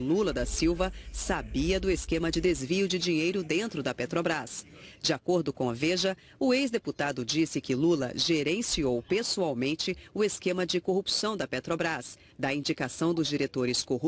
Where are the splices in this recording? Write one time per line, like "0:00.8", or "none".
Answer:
0:12.9